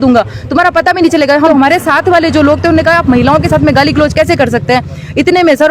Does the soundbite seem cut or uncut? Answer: cut